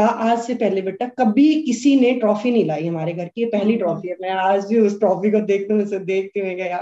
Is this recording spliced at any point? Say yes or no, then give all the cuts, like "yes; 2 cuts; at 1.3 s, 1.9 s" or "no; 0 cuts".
no; 0 cuts